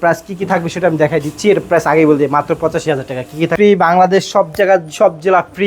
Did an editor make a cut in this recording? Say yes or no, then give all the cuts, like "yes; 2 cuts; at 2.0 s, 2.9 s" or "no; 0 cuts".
yes; 1 cut; at 3.5 s